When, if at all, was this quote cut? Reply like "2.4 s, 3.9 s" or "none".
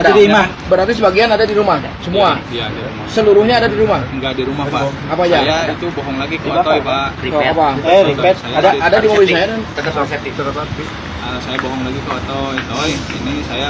none